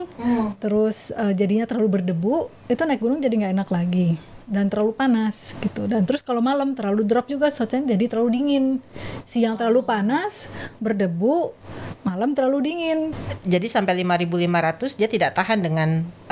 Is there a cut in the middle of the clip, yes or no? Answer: yes